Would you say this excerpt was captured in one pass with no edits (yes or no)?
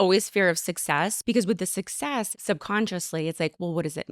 no